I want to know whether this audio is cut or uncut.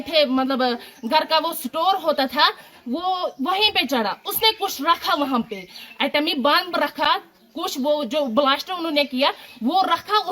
uncut